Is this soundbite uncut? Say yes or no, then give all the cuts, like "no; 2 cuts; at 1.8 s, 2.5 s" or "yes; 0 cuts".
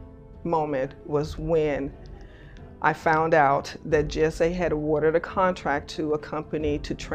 yes; 0 cuts